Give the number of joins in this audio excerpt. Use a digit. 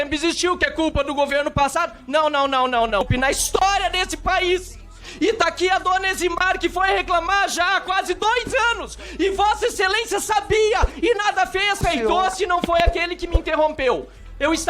2